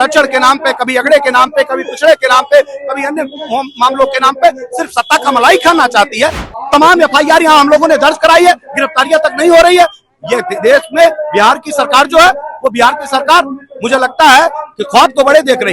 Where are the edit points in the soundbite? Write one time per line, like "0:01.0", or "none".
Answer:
0:06.4